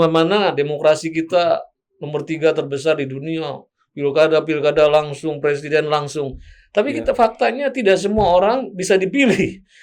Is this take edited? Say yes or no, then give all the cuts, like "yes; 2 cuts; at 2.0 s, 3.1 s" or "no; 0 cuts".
no; 0 cuts